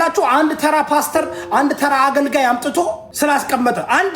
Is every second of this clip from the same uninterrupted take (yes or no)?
no